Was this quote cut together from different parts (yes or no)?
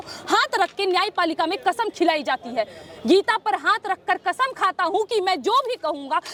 no